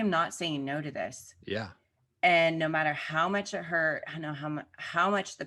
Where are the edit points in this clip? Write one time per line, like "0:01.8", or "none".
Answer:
none